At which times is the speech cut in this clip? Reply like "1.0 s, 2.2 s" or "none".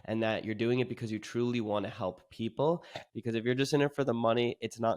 3.1 s